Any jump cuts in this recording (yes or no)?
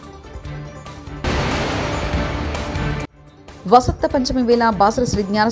no